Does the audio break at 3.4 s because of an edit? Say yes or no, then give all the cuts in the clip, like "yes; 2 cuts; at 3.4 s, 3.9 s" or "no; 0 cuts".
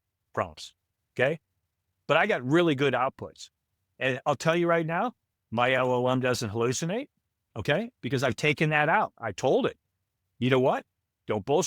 no; 1 cut; at 7.9 s